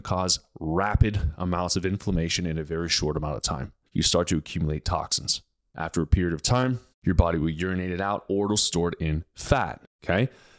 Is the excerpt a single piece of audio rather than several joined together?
no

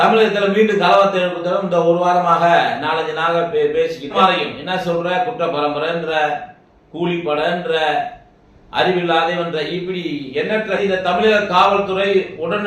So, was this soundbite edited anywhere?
yes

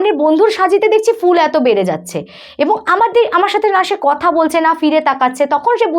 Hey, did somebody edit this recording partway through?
no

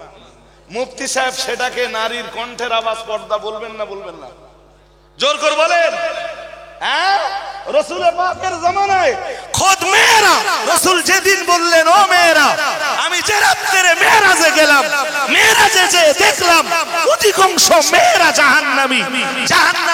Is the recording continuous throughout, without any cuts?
no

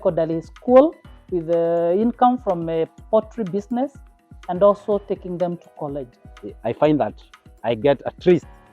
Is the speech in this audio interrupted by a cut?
yes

